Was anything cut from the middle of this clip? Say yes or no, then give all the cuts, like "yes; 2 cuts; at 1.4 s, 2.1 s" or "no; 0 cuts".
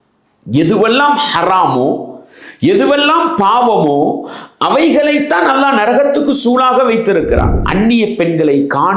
yes; 1 cut; at 7.6 s